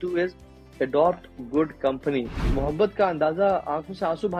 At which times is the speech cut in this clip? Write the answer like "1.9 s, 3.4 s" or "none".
2.5 s

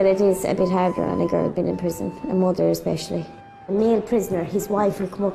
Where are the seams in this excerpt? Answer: 2.8 s

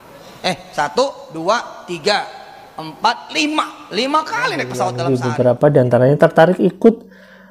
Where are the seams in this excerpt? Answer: 5.3 s

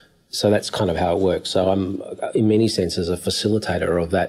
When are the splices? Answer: none

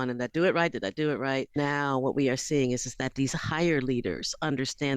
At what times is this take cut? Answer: 1.6 s

